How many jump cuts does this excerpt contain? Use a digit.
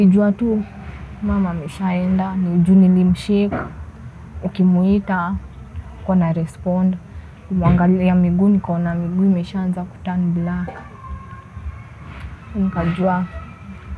0